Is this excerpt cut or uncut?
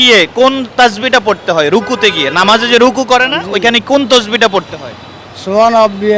uncut